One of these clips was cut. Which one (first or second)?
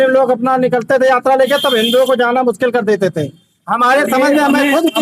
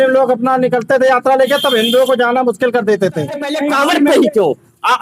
second